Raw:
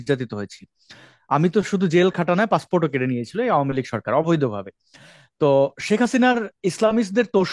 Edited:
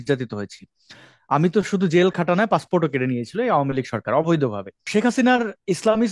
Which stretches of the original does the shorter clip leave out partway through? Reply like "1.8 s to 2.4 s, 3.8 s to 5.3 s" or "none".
4.8 s to 5.8 s